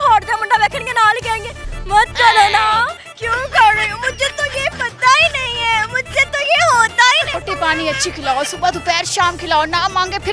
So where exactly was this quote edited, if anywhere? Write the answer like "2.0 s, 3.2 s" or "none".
7.3 s